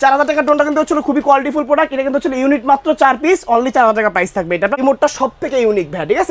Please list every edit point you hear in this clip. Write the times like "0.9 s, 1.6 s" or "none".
4.8 s